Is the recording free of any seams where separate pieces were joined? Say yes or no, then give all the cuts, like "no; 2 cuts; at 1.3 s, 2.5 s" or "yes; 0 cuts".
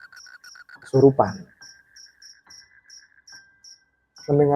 yes; 0 cuts